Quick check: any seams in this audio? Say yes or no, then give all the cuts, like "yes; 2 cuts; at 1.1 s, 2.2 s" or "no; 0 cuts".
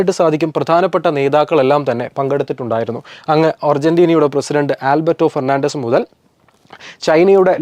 no; 0 cuts